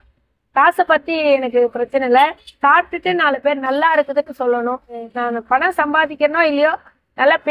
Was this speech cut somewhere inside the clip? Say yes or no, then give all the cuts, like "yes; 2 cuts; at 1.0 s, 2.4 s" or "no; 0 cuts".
yes; 1 cut; at 5.1 s